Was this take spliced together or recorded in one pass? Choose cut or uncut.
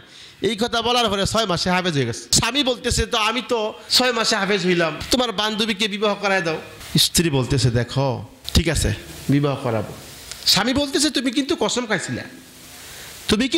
cut